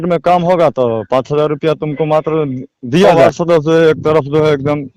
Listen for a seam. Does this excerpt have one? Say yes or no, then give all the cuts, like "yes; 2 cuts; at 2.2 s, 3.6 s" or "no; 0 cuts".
yes; 1 cut; at 3.2 s